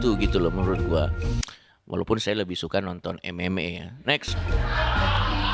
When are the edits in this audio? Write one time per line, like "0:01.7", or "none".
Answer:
none